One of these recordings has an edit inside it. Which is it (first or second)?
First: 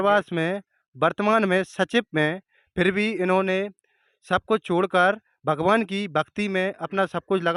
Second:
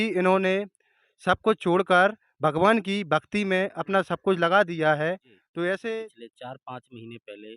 second